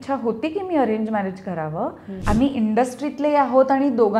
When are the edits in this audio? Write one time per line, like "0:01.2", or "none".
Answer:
0:02.2